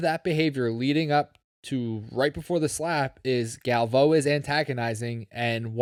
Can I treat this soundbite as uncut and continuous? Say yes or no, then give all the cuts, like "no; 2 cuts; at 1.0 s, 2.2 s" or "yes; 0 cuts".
yes; 0 cuts